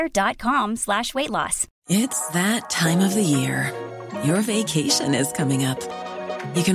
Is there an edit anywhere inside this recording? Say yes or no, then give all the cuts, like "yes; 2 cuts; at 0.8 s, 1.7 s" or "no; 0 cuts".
yes; 1 cut; at 1.6 s